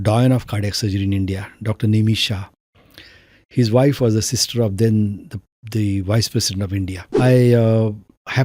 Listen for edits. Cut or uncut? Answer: cut